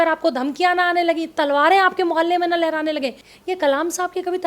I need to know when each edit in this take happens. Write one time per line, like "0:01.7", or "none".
0:03.2